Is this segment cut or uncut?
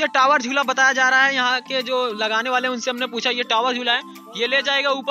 uncut